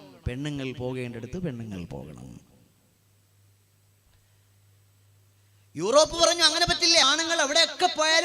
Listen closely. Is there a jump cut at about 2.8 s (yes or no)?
no